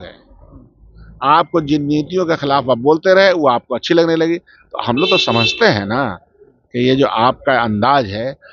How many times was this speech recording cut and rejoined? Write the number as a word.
zero